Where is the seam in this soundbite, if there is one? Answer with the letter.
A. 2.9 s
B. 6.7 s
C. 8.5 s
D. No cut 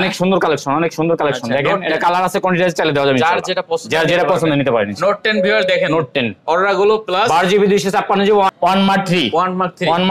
C